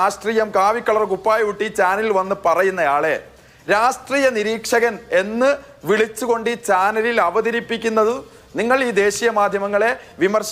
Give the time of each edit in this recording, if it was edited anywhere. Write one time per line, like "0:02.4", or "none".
none